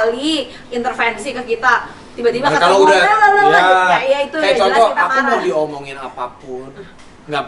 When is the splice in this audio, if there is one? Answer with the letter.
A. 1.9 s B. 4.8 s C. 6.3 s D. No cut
D